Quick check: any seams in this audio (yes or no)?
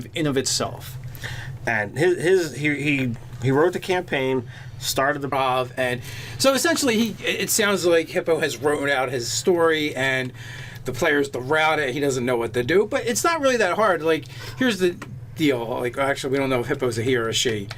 no